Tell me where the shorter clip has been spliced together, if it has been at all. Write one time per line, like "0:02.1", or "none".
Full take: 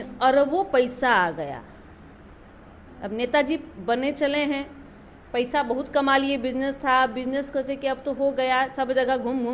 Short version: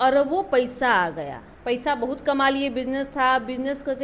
0:01.4